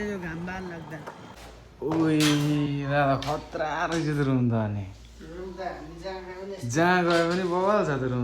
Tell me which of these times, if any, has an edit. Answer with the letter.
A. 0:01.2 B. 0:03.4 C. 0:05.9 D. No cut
A